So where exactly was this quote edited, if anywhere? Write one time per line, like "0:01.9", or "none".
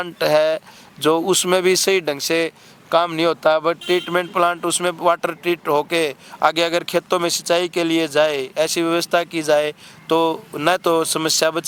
none

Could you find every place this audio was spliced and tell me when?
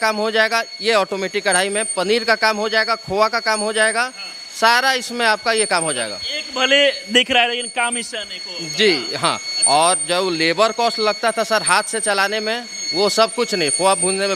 none

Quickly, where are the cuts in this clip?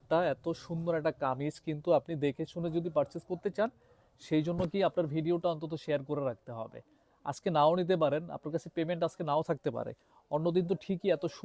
none

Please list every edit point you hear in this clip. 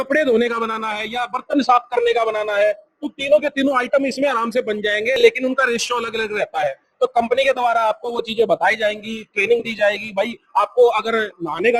none

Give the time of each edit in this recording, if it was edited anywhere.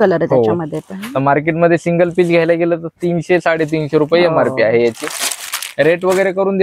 none

